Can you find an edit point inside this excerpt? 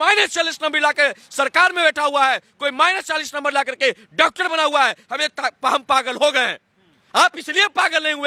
no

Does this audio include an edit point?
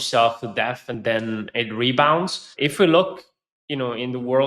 yes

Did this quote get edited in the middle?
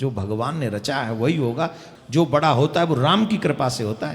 yes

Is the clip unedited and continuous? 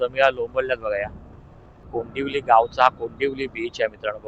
no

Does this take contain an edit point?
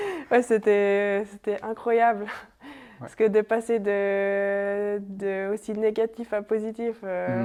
no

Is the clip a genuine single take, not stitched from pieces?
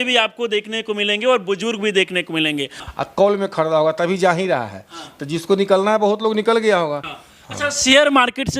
no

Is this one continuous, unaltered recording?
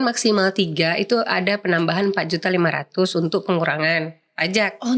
yes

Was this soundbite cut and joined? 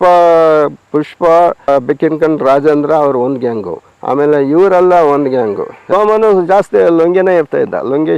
yes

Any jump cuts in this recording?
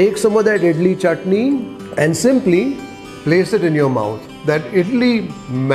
yes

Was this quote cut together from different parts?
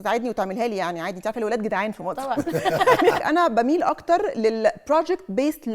yes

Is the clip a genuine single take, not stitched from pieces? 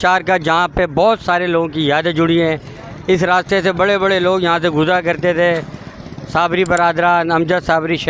yes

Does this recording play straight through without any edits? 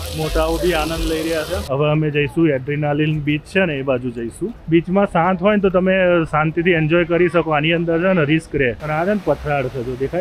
no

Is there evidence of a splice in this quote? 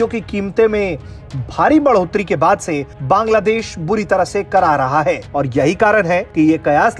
yes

